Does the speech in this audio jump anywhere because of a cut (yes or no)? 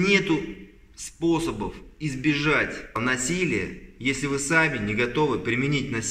yes